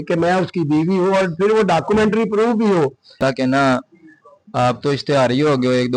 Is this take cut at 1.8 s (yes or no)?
no